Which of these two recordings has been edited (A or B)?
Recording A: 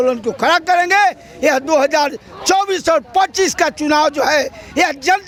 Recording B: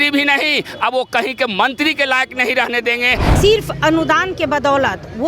B